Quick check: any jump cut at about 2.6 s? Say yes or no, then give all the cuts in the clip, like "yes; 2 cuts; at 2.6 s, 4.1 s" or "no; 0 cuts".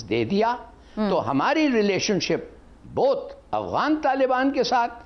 no; 0 cuts